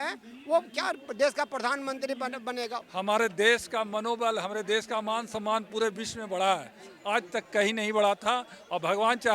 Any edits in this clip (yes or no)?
yes